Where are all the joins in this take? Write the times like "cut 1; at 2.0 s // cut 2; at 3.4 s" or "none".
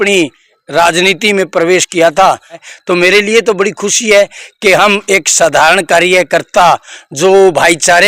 cut 1; at 2.6 s